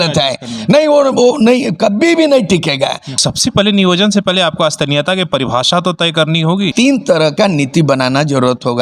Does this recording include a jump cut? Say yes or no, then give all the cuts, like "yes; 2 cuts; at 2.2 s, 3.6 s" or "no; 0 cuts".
yes; 2 cuts; at 3.1 s, 6.7 s